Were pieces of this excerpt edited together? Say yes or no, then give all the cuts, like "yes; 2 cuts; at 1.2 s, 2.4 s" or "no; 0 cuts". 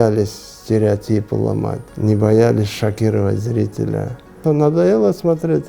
yes; 2 cuts; at 1.8 s, 4.4 s